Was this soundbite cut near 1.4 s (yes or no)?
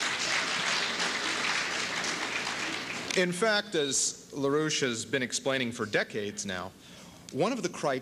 no